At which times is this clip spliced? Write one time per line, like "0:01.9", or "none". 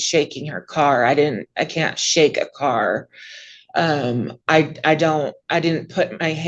none